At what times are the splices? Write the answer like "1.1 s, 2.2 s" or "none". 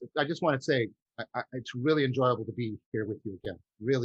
1.0 s